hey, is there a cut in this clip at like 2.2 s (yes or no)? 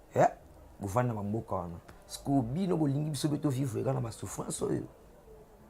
no